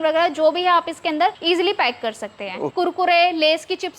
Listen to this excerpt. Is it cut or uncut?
cut